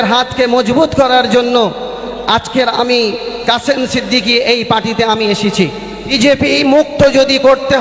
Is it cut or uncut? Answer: cut